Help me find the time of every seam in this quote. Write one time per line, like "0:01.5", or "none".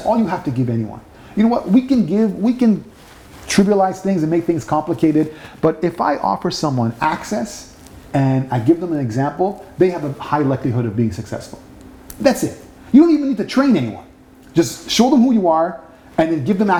none